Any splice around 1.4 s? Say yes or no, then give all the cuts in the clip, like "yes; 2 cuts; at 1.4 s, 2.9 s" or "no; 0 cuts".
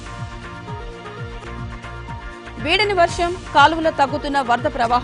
yes; 1 cut; at 1.4 s